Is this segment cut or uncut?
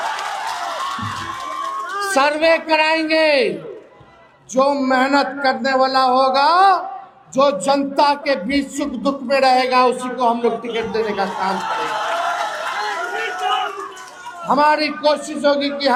uncut